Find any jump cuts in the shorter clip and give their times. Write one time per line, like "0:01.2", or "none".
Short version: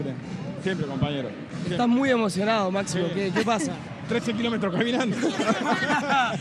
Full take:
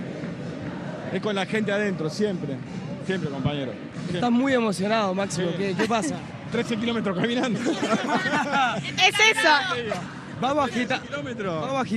none